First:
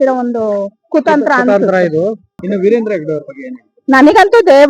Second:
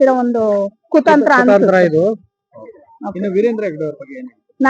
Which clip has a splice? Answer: first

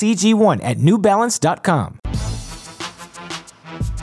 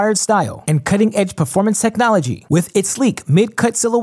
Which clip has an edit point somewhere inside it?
first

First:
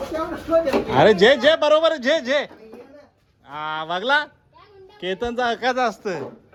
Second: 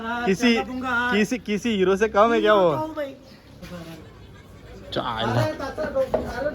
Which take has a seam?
second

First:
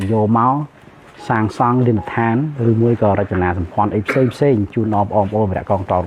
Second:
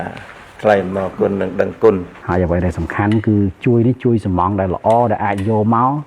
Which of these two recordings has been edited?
second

